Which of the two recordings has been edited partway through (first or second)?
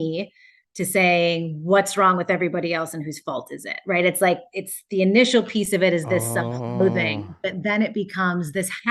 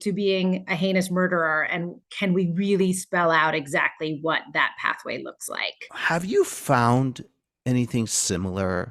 second